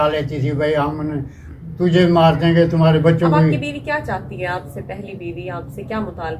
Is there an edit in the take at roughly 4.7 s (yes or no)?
no